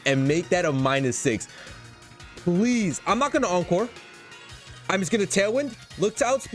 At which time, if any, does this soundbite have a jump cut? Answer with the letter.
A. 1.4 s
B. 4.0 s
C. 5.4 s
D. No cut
D